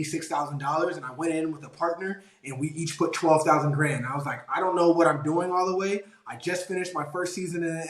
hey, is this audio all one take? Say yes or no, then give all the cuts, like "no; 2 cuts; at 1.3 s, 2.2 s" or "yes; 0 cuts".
yes; 0 cuts